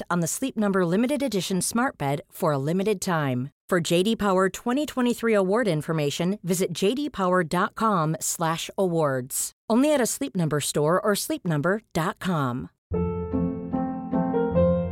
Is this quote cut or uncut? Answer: cut